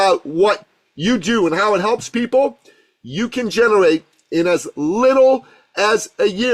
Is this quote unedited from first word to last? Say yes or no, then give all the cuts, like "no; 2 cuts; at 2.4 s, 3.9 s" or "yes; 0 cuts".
yes; 0 cuts